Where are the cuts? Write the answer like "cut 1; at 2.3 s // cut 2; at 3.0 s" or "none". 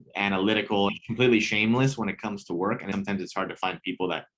cut 1; at 1.0 s // cut 2; at 2.9 s

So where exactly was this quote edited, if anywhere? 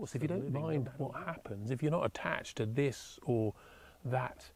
none

